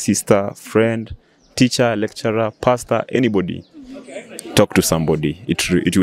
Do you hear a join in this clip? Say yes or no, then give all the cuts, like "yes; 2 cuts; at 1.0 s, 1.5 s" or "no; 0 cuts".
no; 0 cuts